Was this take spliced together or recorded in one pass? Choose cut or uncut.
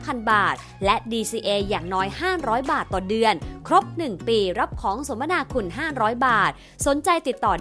uncut